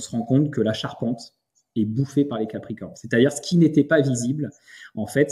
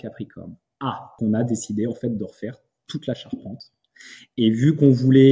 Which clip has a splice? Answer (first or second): second